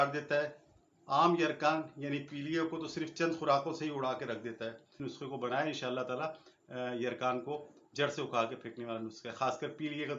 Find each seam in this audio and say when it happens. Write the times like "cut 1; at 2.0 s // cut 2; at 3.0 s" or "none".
cut 1; at 4.9 s